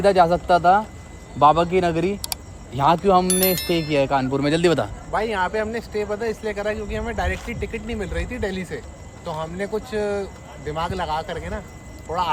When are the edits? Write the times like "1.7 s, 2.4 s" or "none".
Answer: none

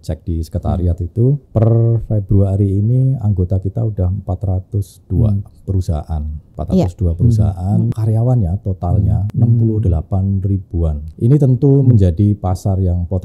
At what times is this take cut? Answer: 1.4 s, 6.5 s, 7.9 s, 9.2 s, 11.1 s

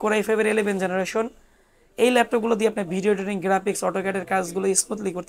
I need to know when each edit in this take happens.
none

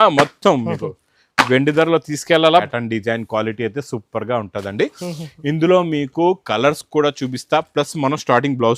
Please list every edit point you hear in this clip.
2.7 s

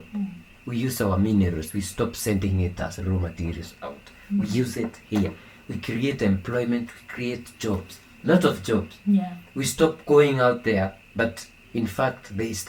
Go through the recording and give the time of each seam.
none

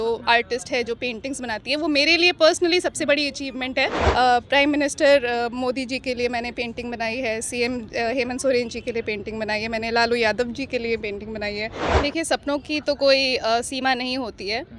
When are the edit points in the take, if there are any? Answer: 4.0 s, 11.8 s

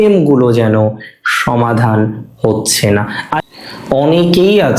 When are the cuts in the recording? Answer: 3.3 s

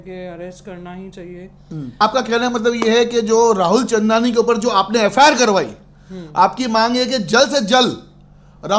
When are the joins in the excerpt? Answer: 2.0 s

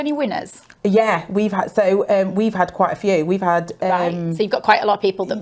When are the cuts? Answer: none

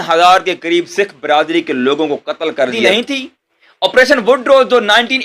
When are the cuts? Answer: 2.9 s

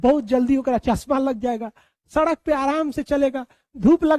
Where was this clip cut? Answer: none

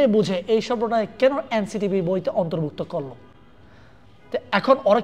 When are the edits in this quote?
none

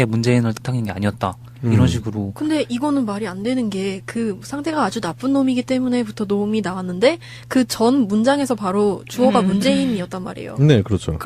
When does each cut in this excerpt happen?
none

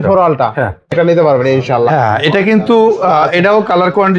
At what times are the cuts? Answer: 0.9 s

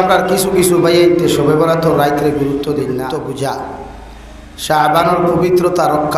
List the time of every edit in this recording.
3.2 s

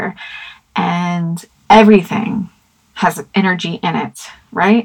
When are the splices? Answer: 1.5 s

